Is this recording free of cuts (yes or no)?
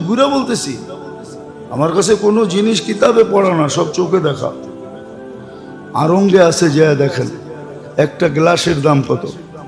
yes